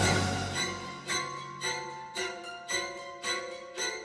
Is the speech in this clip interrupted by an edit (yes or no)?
no